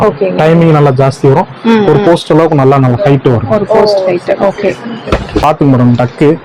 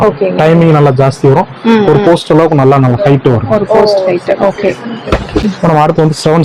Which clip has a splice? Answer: first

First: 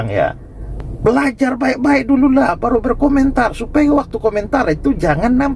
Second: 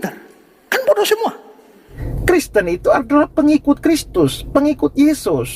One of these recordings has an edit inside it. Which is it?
second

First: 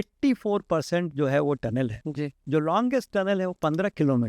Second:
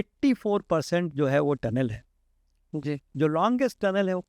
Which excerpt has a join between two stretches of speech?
first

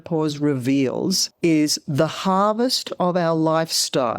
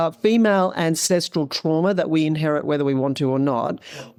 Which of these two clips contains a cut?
first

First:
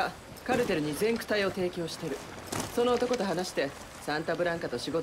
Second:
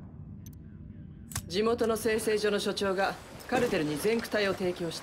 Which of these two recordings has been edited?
second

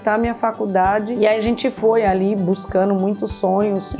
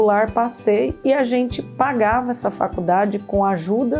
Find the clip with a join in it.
first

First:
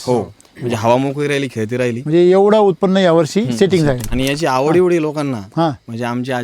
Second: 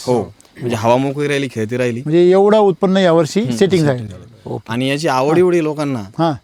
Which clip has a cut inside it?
first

